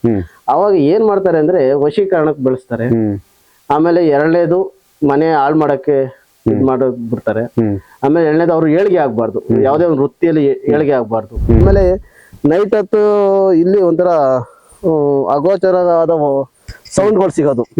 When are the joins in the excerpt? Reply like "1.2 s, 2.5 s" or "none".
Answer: 11.6 s